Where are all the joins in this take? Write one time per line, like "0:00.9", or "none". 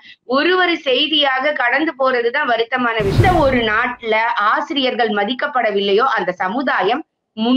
0:03.2